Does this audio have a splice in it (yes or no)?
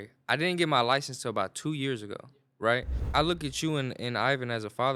yes